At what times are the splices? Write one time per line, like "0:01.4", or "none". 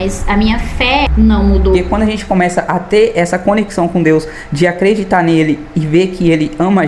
0:01.1
0:01.8

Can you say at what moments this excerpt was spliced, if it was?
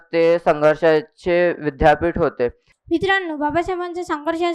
0:02.7

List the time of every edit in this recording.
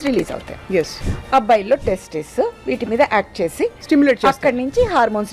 0:01.0

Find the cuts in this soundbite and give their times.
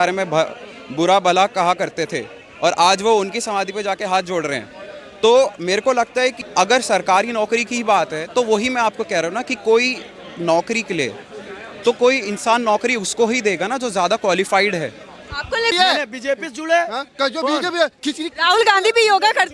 0:06.4
0:15.7

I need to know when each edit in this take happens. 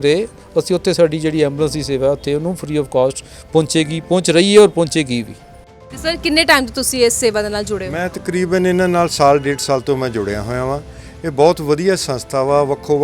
0:05.7

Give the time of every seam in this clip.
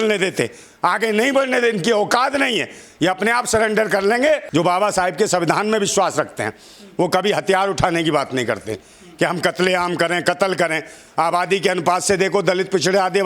0:04.4

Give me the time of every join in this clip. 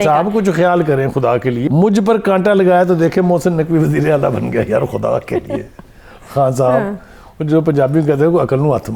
0:01.6

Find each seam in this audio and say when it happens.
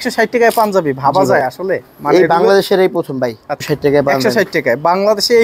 0:01.9
0:03.5

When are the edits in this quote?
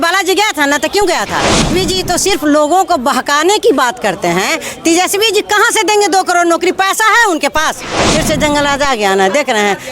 0:01.7
0:08.0

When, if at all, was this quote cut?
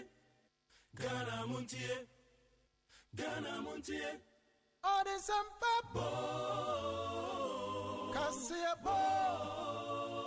none

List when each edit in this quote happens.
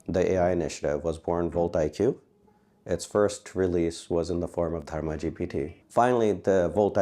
0:05.8

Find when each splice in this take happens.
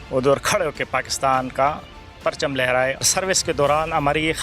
0:03.0

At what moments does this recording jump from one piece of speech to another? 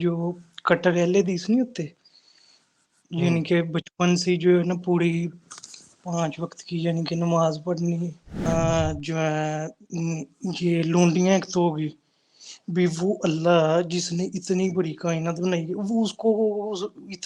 0:08.4

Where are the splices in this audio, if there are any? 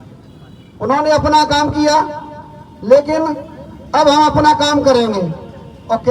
none

